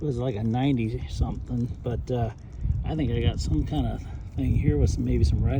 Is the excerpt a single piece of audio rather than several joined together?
yes; 0 cuts

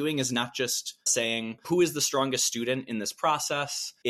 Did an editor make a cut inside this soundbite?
yes; 1 cut; at 1.1 s

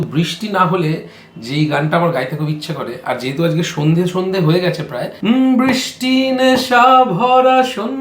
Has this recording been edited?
yes; 1 cut; at 5.0 s

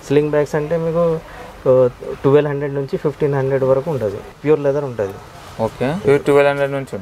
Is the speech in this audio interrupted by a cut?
no; 0 cuts

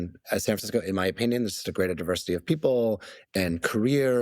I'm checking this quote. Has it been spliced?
yes; 1 cut; at 3.2 s

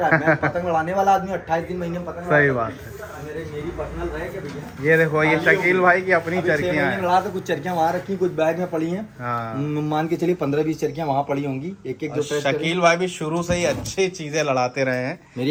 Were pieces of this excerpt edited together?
no; 0 cuts

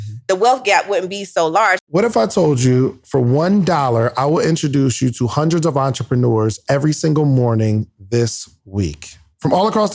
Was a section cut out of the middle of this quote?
yes; 1 cut; at 1.8 s

